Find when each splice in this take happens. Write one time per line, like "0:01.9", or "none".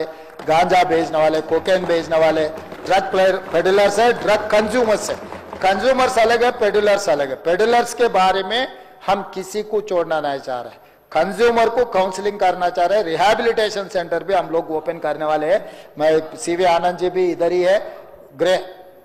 none